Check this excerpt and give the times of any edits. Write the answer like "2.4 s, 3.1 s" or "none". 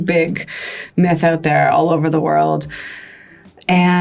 none